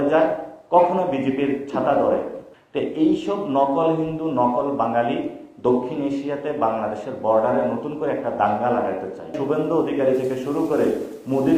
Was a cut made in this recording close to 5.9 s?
no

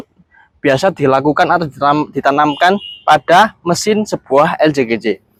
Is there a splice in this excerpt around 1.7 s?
no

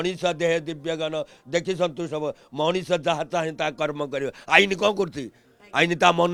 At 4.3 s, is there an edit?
no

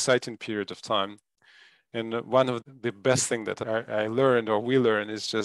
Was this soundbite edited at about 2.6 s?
yes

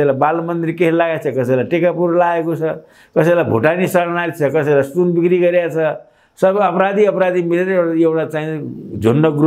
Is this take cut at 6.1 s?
no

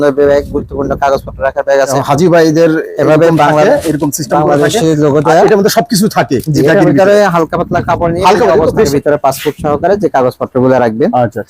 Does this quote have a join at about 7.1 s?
no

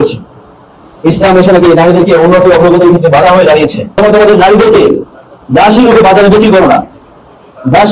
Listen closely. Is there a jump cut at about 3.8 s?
yes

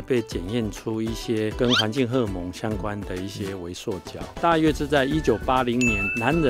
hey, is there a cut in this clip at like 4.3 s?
yes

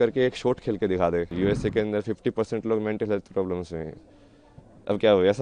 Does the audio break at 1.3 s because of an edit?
yes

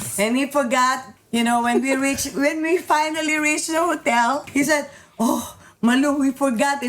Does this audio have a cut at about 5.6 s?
no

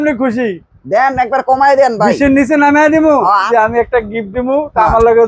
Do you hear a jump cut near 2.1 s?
no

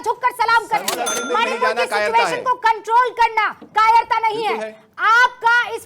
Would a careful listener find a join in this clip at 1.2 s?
yes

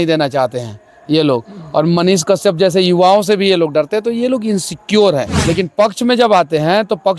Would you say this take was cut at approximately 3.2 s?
no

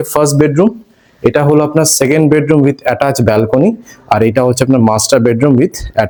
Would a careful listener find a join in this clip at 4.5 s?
no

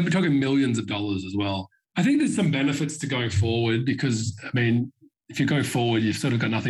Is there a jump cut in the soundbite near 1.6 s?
yes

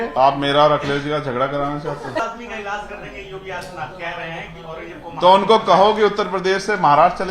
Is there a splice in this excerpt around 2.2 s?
yes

